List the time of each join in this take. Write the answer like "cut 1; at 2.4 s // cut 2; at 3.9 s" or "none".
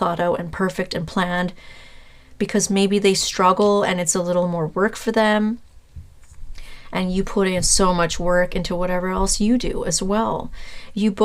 none